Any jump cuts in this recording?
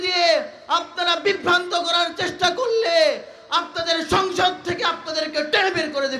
no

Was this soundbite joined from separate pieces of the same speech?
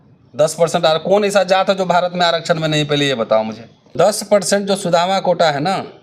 yes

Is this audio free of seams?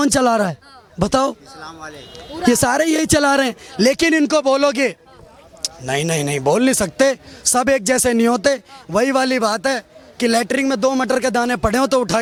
yes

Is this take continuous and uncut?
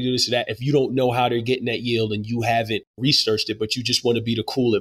no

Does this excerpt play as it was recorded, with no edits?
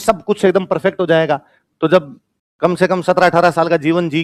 yes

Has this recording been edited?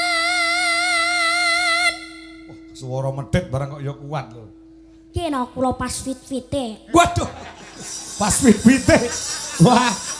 no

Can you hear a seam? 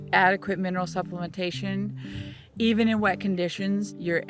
no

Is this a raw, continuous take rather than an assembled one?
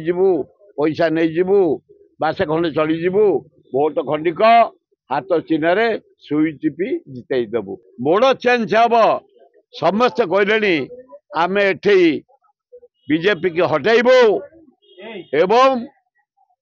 no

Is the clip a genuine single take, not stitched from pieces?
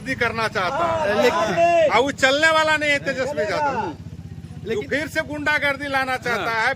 yes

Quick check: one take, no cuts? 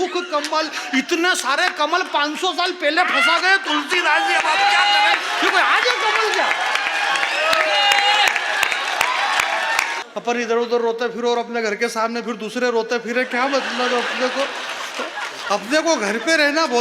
no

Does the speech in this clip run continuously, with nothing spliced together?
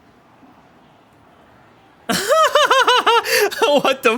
yes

